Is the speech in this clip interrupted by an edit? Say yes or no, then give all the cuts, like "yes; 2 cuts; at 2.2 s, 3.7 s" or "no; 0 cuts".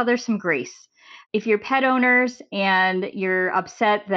yes; 1 cut; at 1.1 s